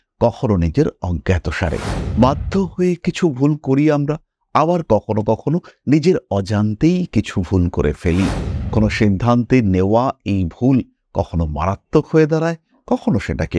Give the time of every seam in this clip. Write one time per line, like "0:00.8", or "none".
none